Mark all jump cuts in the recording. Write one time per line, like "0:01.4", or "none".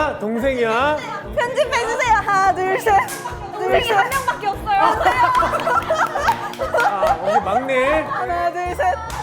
0:08.3